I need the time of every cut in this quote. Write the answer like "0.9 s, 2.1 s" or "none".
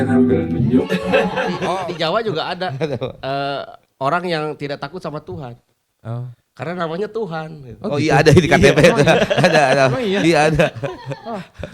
1.6 s